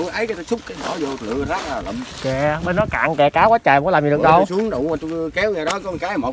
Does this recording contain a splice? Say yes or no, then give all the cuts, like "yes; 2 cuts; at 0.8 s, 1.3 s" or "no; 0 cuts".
no; 0 cuts